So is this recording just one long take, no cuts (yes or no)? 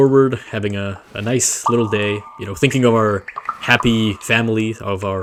yes